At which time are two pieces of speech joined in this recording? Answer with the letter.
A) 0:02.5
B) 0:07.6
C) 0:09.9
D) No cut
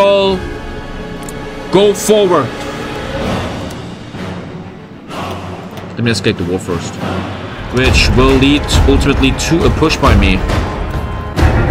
B